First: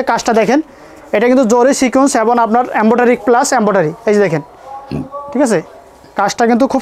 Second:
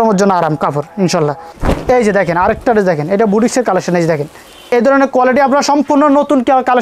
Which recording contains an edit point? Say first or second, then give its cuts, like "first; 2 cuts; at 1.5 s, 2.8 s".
second; 2 cuts; at 1.5 s, 4.7 s